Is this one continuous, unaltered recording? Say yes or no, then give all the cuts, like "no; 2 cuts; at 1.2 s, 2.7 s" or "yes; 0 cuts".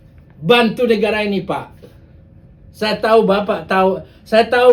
yes; 0 cuts